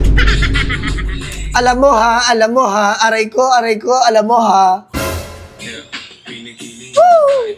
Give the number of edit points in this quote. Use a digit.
0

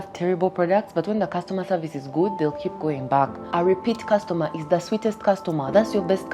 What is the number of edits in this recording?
1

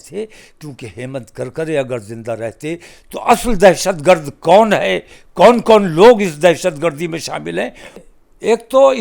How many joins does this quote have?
1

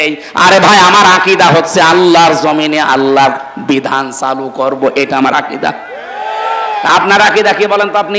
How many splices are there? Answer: 0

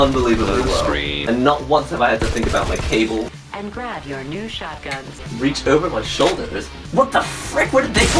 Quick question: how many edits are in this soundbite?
2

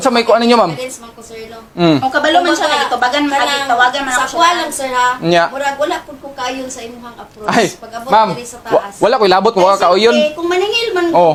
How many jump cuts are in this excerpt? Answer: 0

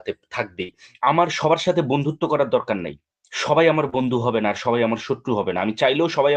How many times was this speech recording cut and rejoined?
1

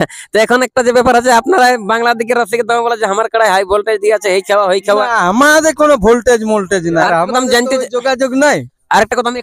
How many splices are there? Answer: 1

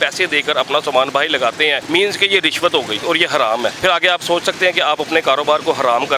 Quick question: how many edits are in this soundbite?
3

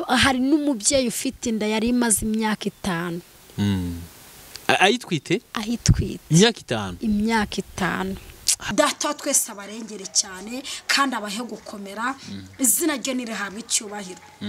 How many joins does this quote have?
1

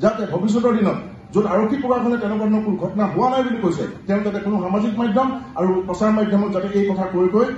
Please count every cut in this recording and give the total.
0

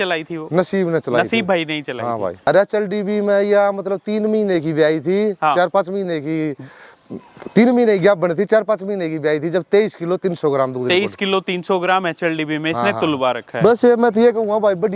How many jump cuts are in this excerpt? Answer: 2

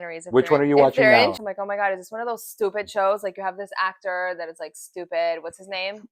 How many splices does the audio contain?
1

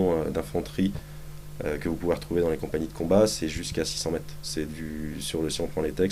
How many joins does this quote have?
1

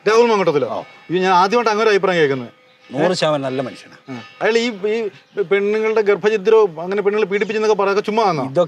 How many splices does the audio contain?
0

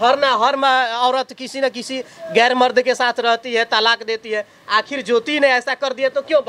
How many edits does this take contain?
0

